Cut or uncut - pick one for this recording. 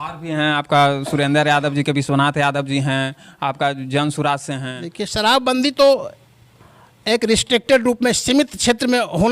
cut